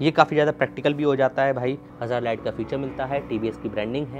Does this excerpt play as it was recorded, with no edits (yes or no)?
no